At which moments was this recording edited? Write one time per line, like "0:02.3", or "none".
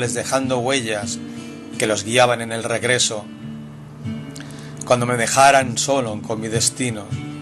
none